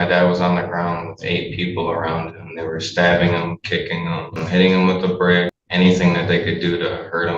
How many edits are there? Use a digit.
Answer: 2